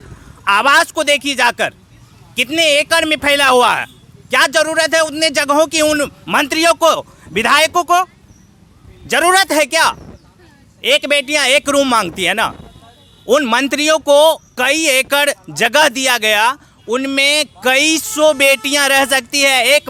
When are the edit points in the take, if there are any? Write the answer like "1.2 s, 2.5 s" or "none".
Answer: none